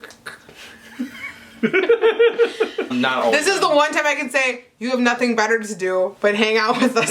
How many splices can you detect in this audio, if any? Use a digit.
1